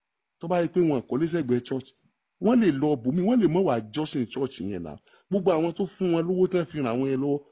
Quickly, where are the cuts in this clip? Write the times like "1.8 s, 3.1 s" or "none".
none